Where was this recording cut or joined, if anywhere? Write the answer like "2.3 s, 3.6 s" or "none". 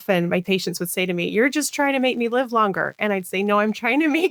none